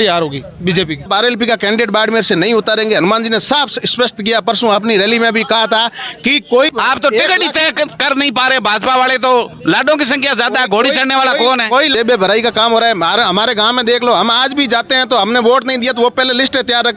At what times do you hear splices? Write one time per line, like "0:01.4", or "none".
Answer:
0:01.1
0:06.7
0:11.9